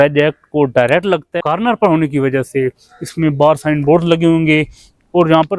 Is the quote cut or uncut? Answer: cut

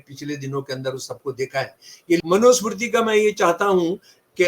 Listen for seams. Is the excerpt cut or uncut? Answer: cut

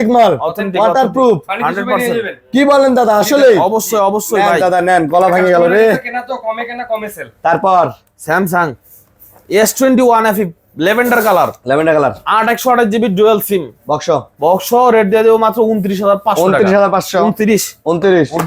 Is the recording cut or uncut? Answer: uncut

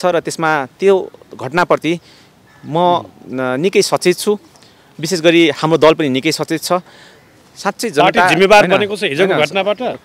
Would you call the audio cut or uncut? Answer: uncut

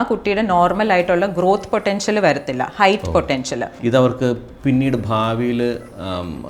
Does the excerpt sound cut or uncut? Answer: cut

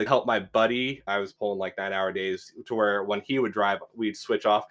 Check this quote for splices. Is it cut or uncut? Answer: cut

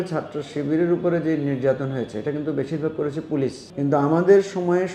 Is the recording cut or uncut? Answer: cut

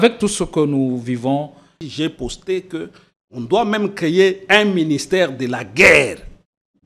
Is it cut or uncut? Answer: cut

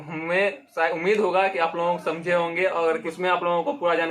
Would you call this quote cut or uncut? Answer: cut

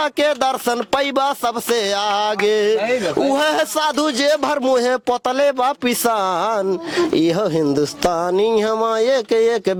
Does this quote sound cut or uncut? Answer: uncut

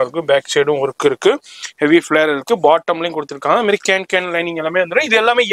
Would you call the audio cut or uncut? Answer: uncut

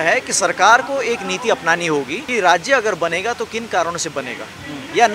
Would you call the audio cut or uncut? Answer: cut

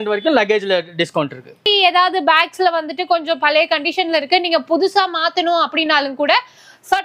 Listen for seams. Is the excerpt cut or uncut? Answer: cut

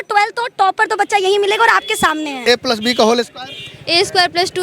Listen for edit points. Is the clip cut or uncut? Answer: cut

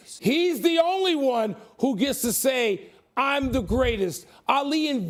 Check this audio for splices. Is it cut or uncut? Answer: uncut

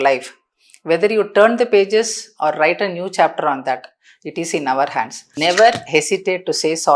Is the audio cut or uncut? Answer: cut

